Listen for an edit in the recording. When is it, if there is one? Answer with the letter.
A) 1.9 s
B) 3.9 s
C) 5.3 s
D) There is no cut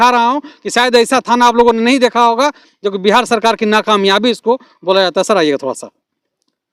D